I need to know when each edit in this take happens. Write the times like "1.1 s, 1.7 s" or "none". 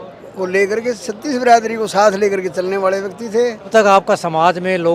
3.7 s